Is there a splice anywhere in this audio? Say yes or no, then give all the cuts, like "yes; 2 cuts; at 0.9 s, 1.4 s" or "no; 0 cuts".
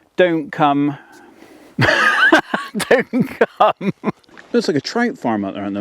yes; 1 cut; at 4.3 s